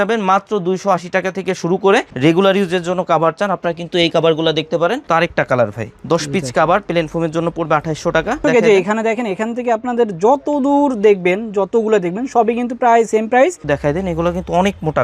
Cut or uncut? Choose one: cut